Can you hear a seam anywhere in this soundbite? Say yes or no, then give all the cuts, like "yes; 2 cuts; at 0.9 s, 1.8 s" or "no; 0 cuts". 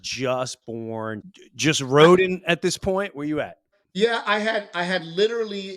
yes; 1 cut; at 1.2 s